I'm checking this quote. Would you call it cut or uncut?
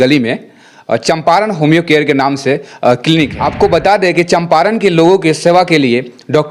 cut